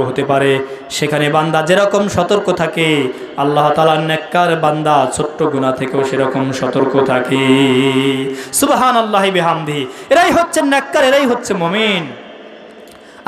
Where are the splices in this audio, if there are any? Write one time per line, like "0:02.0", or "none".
none